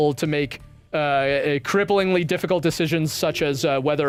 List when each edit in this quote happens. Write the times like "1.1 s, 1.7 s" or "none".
none